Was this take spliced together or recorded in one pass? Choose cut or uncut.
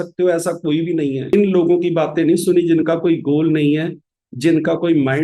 cut